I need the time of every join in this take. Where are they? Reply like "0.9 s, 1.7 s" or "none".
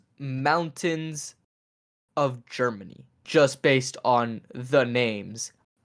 3.3 s